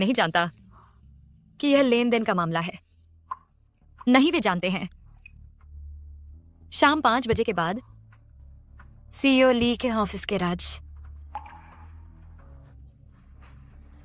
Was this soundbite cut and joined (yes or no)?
no